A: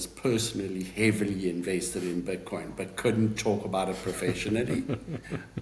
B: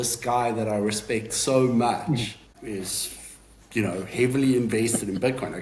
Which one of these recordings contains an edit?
B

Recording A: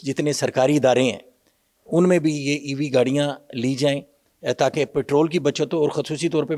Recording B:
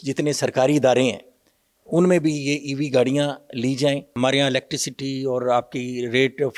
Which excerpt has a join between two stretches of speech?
B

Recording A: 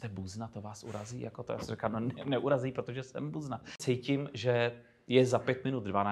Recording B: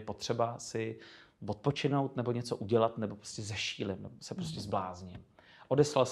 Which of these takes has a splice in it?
A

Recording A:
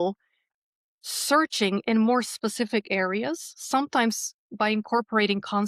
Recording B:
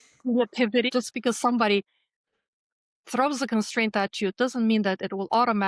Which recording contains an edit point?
B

